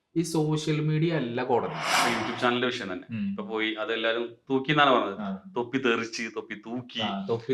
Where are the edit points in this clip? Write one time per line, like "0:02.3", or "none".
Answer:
0:01.9